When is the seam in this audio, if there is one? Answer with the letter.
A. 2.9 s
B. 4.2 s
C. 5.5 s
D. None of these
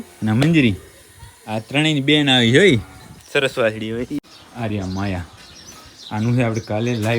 B